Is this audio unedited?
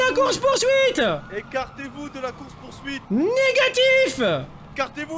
no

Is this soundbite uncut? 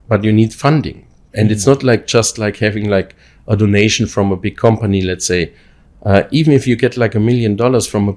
yes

